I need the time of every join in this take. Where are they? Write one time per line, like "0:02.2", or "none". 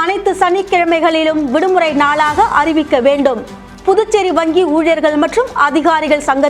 none

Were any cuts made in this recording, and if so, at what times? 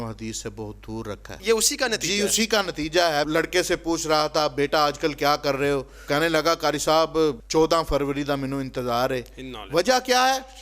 0:01.3
0:03.3
0:05.9
0:07.4

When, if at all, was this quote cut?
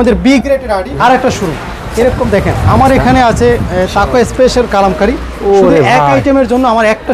0:00.9

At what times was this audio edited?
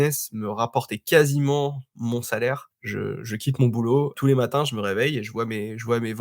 0:02.7
0:04.2

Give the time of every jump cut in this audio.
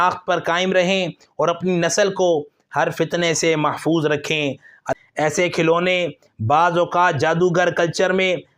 0:04.9

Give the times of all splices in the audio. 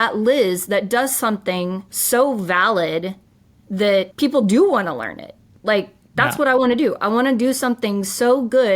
0:01.9
0:04.1

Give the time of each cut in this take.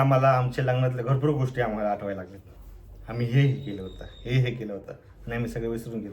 none

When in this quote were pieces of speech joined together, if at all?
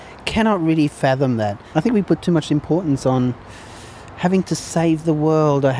0:01.6

